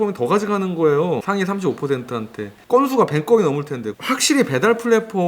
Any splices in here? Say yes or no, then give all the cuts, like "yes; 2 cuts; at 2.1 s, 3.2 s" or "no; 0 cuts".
yes; 2 cuts; at 1.2 s, 4.0 s